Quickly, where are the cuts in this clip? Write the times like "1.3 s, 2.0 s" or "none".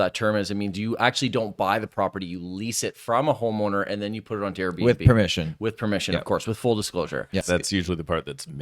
7.4 s